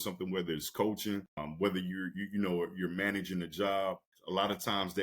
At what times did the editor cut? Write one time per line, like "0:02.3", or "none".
0:01.4
0:04.1